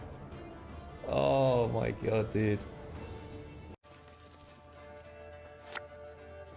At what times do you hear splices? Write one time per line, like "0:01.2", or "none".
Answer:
0:03.8